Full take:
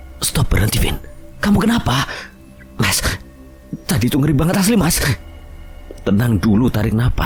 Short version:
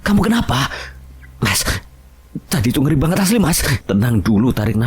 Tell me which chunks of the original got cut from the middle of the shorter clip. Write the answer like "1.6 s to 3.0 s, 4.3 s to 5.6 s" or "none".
5.1 s to 5.9 s